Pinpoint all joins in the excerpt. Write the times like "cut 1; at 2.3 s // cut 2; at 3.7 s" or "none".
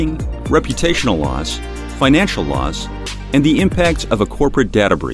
none